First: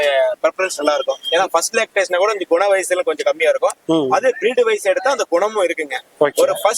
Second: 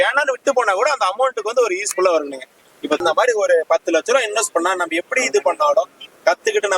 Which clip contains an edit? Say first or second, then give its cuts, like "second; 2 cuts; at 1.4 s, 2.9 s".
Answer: second; 1 cut; at 3.0 s